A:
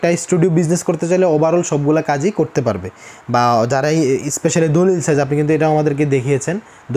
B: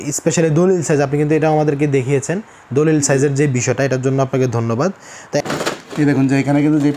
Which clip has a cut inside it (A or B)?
B